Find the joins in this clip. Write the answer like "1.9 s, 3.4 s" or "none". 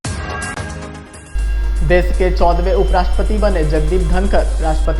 1.0 s